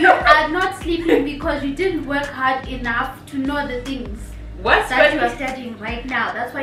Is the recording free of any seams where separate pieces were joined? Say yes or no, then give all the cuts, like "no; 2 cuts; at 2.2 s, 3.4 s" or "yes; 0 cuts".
yes; 0 cuts